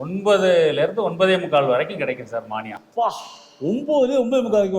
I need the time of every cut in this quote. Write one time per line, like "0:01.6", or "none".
none